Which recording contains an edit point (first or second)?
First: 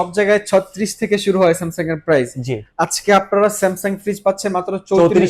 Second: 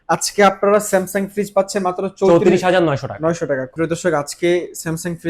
second